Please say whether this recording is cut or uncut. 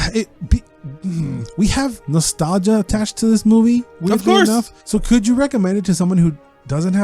cut